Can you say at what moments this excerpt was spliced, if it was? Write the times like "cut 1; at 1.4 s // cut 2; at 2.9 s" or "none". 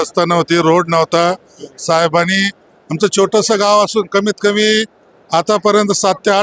none